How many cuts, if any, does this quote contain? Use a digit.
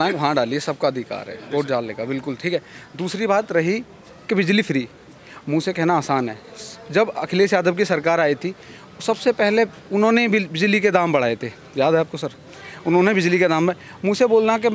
0